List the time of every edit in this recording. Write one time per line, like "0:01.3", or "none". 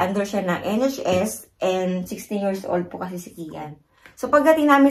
0:03.7